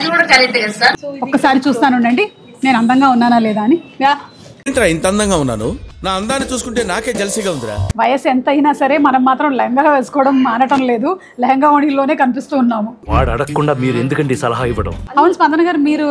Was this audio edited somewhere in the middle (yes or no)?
yes